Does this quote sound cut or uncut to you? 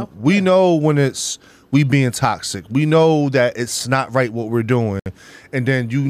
uncut